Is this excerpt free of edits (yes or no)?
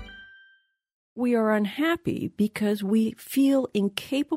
no